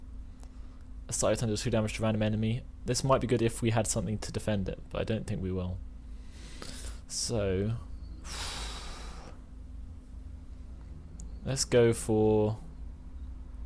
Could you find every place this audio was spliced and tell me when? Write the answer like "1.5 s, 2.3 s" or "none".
11.5 s